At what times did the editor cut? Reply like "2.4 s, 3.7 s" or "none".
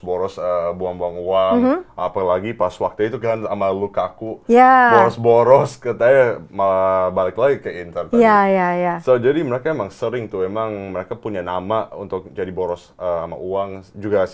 none